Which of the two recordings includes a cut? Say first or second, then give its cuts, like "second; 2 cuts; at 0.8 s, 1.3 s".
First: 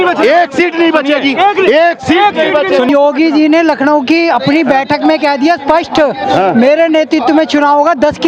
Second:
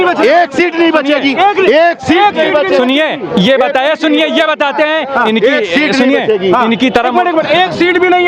first; 1 cut; at 2.9 s